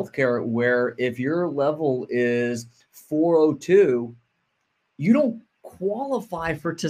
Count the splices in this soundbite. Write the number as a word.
zero